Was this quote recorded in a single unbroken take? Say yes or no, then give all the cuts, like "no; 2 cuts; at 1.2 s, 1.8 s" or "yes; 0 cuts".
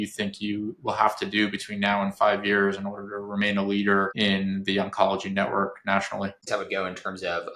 no; 1 cut; at 6.5 s